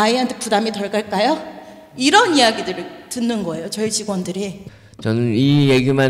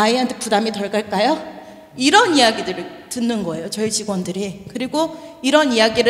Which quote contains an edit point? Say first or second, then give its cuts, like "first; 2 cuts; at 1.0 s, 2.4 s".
first; 1 cut; at 4.6 s